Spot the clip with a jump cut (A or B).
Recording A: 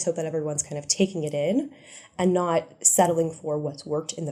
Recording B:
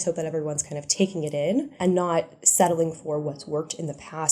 B